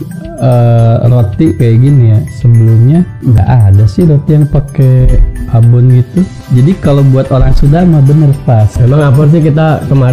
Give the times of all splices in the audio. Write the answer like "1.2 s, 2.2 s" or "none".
3.4 s, 6.4 s, 8.7 s